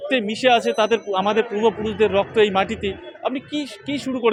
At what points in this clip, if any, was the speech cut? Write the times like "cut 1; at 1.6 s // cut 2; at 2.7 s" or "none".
none